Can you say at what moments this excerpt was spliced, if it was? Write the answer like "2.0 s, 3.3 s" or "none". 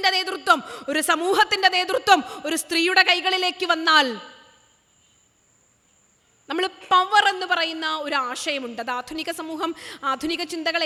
none